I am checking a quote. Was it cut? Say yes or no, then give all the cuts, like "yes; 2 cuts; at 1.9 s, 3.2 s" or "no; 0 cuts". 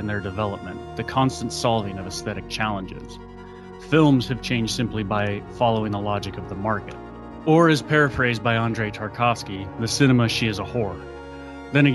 no; 0 cuts